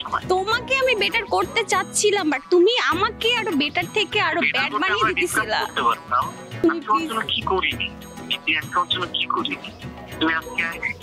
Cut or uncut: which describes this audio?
cut